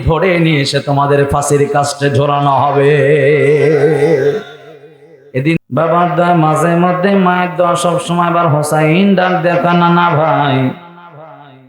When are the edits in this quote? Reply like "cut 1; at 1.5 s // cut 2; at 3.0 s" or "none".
cut 1; at 5.6 s